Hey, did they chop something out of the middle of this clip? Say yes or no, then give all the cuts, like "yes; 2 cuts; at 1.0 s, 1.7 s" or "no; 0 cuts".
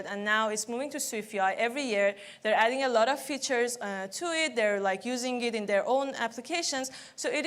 no; 0 cuts